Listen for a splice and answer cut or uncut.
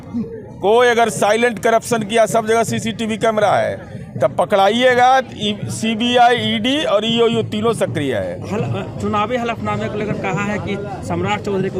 uncut